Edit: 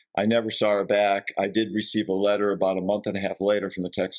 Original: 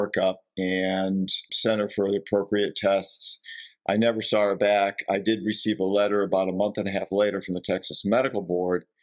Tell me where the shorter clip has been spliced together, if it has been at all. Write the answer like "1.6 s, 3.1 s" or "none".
none